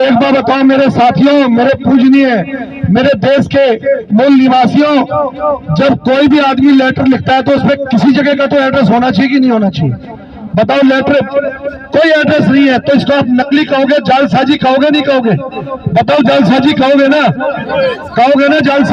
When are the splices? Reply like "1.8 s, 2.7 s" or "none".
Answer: none